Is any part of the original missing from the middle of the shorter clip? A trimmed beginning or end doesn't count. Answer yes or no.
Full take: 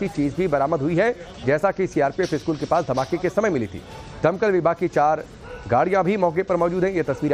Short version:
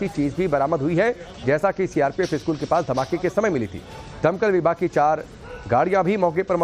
no